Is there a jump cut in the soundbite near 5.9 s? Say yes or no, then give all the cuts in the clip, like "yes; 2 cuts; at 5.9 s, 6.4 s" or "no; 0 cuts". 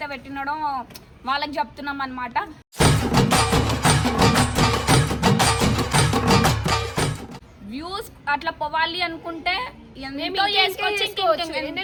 no; 0 cuts